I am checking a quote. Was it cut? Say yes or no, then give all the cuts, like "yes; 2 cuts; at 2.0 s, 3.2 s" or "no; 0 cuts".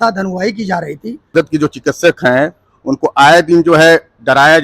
yes; 1 cut; at 1.3 s